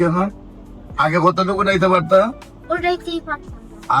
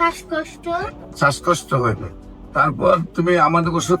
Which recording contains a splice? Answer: second; 1 cut; at 1.0 s

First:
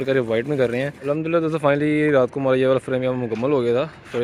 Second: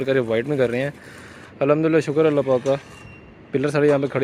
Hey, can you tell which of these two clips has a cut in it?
first; 1 cut; at 0.9 s

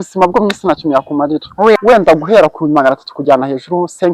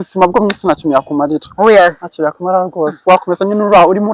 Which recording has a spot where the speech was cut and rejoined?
first; 1 cut; at 1.8 s

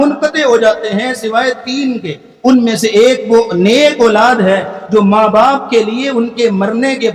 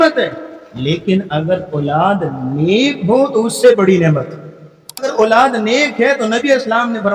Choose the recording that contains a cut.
second; 1 cut; at 5.1 s

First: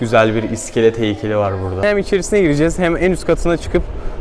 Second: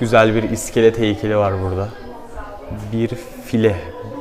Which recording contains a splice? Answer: first; 1 cut; at 1.8 s

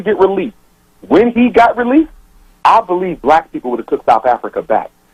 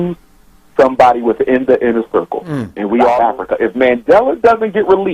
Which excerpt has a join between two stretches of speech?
second; 1 cut; at 3.2 s

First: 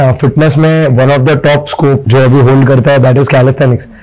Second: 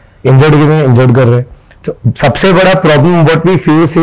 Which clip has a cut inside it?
first; 1 cut; at 2.0 s

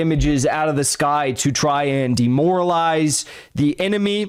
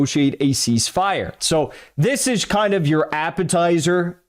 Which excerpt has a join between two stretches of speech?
second; 1 cut; at 1.4 s

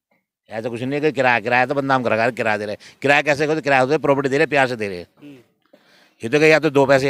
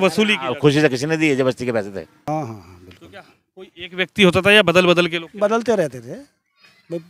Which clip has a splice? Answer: second; 1 cut; at 2.3 s

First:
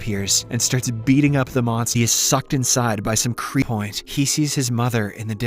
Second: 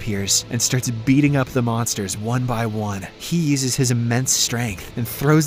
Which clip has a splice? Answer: first; 2 cuts; at 1.9 s, 3.6 s

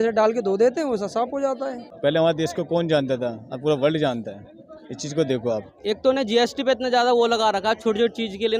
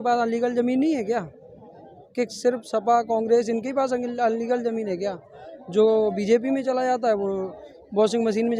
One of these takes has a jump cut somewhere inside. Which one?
first; 2 cuts; at 1.8 s, 5.7 s

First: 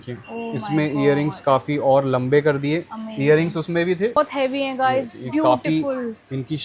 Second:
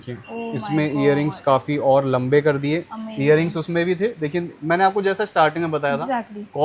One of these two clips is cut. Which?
first; 1 cut; at 4.2 s

